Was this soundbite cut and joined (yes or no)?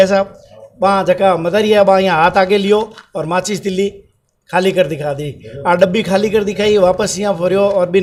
no